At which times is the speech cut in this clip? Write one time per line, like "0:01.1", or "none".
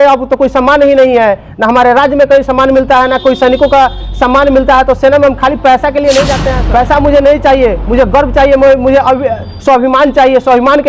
0:06.5